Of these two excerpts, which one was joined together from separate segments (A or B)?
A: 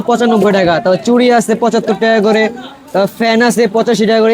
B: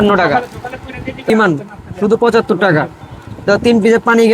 B